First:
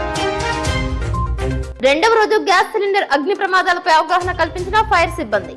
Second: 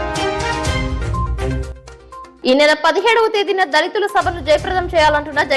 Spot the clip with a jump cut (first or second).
second